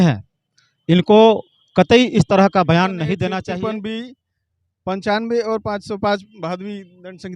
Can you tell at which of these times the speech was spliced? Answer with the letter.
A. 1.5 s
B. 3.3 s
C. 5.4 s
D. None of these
B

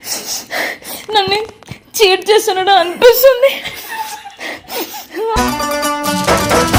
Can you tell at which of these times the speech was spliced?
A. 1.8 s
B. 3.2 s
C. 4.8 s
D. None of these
D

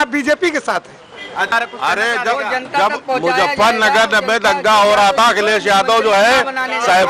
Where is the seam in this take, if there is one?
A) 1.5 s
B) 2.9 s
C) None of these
A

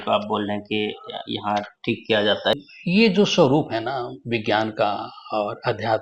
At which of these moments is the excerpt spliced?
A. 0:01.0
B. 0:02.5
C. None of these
B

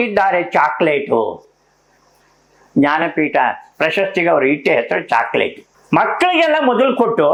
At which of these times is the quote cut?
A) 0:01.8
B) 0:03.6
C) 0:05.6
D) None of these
D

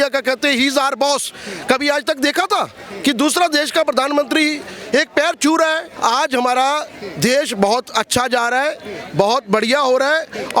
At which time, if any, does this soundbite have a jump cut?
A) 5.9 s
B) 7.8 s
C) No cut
A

